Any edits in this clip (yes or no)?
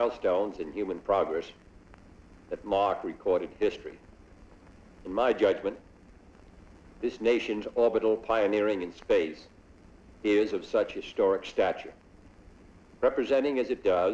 no